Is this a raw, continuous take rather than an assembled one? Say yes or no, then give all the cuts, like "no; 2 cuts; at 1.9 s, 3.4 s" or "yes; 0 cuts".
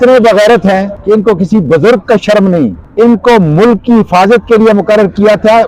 no; 2 cuts; at 0.9 s, 2.8 s